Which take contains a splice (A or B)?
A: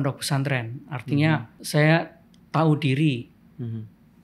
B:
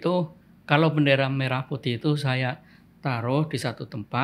A